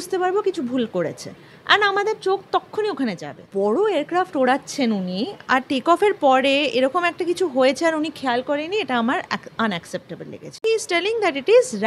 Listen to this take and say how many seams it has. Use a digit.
2